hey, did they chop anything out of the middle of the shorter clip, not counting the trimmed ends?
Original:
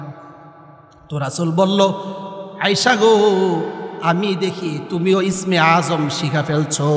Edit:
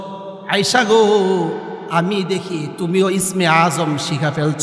no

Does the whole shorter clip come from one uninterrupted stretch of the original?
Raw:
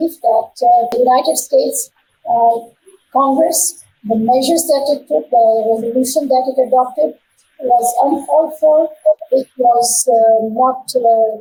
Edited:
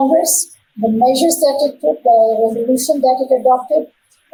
yes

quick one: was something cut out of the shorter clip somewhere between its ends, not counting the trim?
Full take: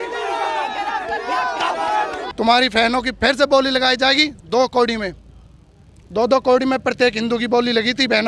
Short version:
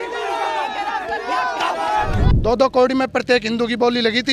yes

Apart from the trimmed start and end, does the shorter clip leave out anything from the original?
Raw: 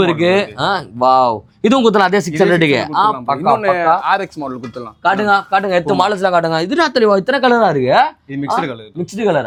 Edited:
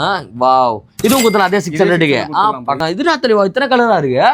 yes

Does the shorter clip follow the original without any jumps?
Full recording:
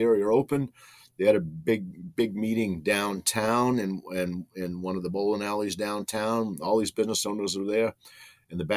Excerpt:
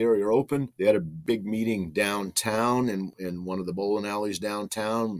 no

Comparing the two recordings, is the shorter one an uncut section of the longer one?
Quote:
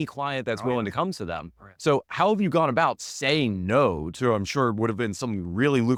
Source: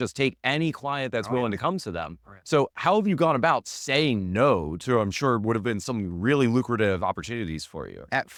yes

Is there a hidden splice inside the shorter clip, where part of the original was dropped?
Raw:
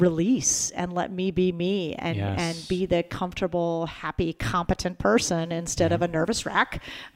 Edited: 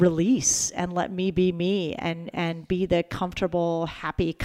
no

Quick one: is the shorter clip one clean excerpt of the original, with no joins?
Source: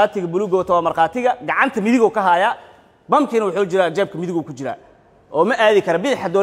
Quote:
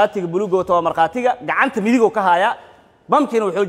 yes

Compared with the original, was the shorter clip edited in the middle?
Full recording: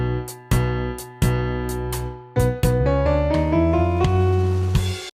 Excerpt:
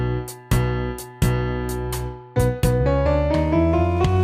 no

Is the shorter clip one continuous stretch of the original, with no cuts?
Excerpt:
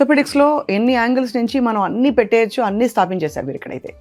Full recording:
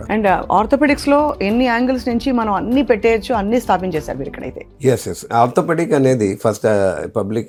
yes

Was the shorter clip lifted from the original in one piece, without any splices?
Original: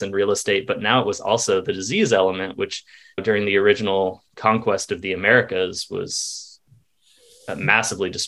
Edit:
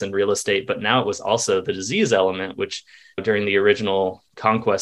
yes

